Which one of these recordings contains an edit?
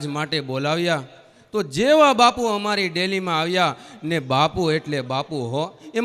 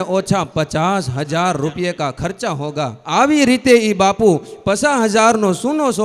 second; 1 cut; at 3.0 s

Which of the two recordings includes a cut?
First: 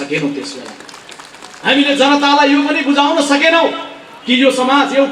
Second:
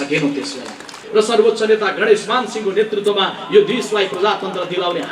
second; 1 cut; at 1.0 s

